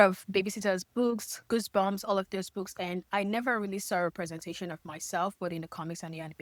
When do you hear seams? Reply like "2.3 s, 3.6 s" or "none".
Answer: none